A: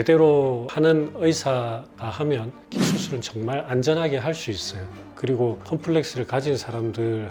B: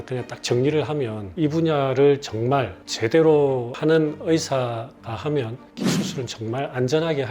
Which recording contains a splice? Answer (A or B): B